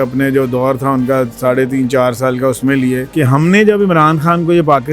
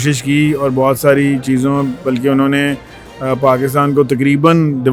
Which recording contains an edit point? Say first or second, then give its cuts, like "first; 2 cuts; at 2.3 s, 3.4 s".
first; 1 cut; at 3.1 s